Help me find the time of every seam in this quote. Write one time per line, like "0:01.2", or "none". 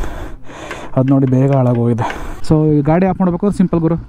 0:02.2